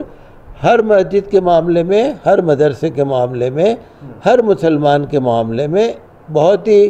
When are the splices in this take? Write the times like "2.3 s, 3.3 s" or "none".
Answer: none